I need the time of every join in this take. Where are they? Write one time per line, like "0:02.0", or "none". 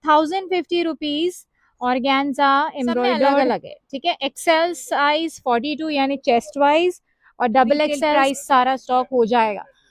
0:03.4
0:08.2

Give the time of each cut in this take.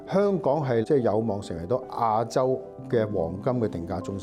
0:00.8
0:02.7

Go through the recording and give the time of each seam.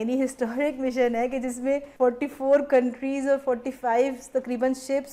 0:01.9

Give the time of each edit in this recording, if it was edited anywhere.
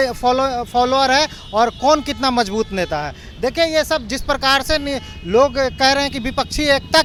none

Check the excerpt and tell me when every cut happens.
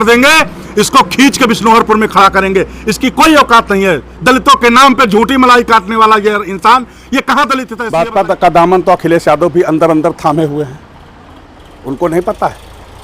0:07.8

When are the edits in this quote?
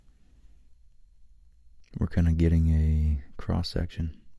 0:01.8

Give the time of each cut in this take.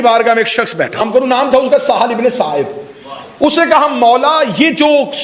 0:01.0

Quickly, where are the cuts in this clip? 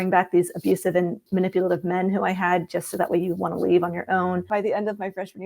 0:01.2
0:04.5

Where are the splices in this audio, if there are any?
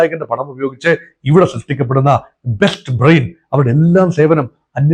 none

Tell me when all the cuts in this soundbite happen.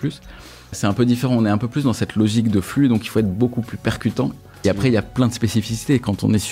0:00.8
0:04.4

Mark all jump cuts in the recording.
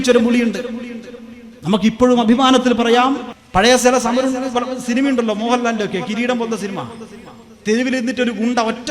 0:03.3

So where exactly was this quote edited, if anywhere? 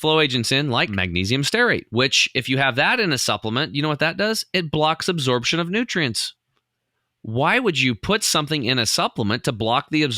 0:00.9
0:01.9

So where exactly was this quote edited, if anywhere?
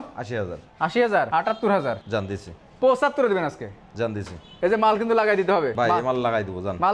0:01.3
0:04.4
0:05.7

